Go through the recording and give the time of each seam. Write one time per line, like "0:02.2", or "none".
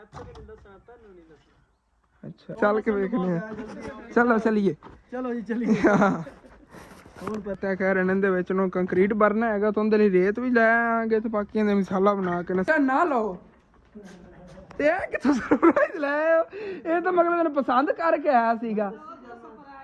0:02.5
0:07.6
0:12.7